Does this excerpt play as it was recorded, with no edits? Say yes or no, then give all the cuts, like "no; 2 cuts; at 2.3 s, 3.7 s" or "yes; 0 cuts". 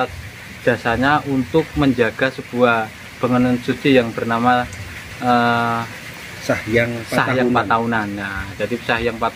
yes; 0 cuts